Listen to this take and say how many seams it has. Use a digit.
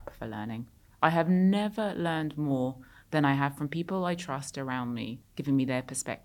1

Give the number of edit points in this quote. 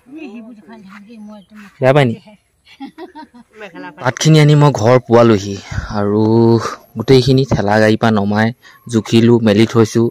1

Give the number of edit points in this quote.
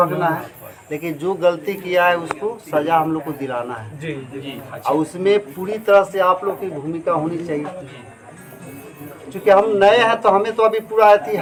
0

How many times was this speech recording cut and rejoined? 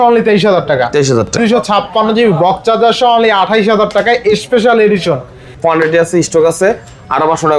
2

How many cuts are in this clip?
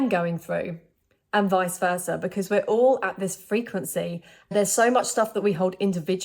1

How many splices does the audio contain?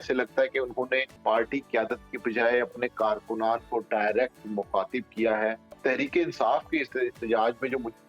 2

